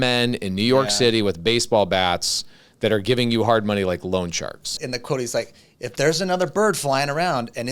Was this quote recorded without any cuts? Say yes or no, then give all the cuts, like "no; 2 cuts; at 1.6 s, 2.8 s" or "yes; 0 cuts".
no; 1 cut; at 4.8 s